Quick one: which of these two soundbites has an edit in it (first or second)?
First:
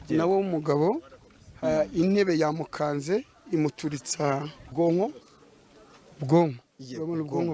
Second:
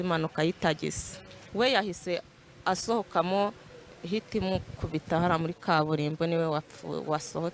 first